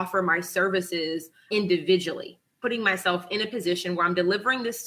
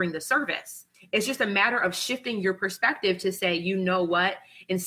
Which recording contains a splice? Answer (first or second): first